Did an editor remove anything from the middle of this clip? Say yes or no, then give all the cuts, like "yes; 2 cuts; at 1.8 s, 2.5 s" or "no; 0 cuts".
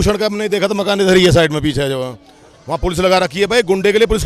no; 0 cuts